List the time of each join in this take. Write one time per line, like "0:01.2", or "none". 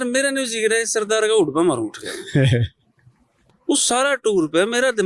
0:03.4